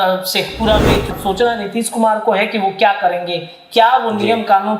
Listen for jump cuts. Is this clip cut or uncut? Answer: cut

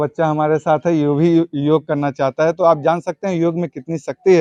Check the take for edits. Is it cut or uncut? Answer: uncut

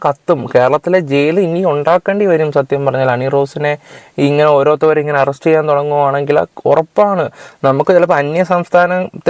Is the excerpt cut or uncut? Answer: uncut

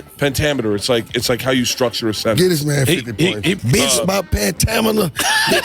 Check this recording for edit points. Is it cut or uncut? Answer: cut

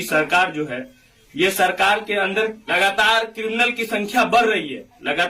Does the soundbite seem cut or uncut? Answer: uncut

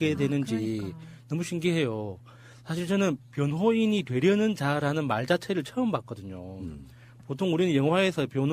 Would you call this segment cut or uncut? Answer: uncut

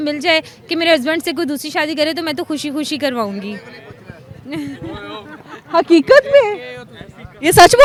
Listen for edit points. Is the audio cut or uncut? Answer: uncut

